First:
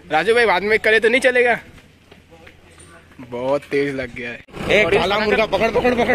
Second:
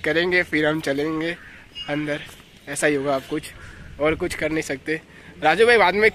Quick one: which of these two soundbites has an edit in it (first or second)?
first